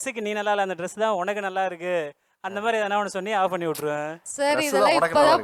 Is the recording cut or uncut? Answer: uncut